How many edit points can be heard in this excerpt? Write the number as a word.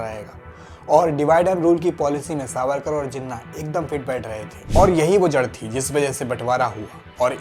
one